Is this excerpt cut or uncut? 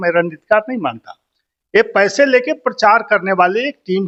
uncut